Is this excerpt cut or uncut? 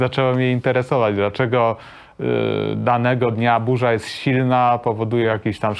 uncut